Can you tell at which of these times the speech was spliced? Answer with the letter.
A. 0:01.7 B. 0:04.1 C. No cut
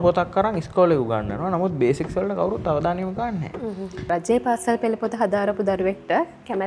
B